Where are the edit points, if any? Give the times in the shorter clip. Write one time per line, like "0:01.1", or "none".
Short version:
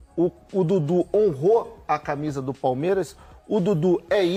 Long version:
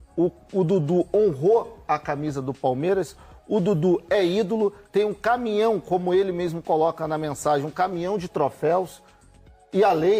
none